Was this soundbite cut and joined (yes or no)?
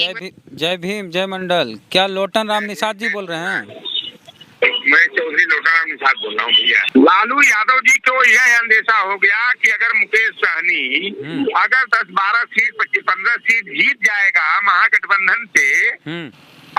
yes